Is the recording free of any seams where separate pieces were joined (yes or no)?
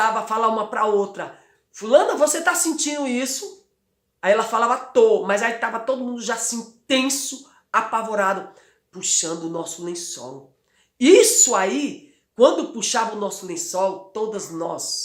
yes